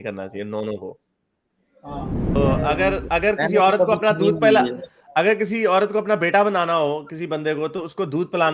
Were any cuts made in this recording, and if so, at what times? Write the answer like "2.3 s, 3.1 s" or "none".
2.4 s